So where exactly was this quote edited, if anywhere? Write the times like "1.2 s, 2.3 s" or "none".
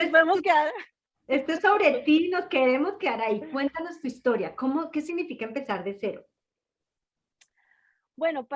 none